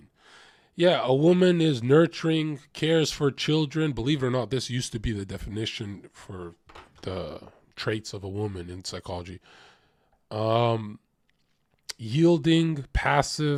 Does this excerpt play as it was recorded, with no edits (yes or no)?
yes